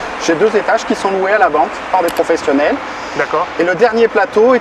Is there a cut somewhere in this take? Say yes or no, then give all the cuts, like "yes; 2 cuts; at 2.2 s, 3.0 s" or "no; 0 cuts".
no; 0 cuts